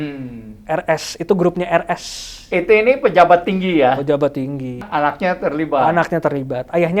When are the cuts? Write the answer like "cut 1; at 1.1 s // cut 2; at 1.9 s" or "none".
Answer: cut 1; at 4.9 s